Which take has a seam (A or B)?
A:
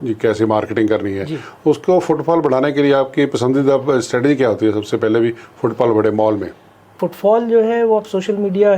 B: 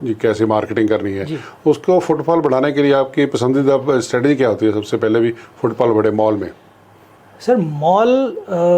A